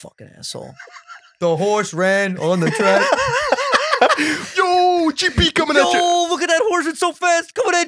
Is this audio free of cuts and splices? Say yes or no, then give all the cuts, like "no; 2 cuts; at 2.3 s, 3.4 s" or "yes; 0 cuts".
yes; 0 cuts